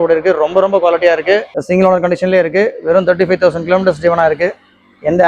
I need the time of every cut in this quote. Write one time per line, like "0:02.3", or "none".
0:01.5